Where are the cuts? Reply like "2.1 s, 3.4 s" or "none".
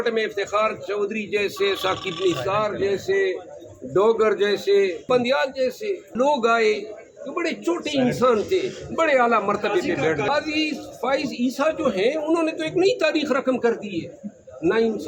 5.0 s, 6.1 s, 10.3 s